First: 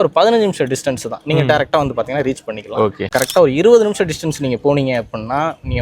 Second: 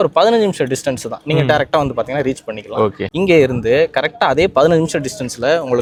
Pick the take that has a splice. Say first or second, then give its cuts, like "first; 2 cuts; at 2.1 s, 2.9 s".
first; 1 cut; at 3.1 s